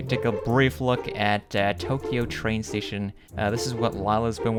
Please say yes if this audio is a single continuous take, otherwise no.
yes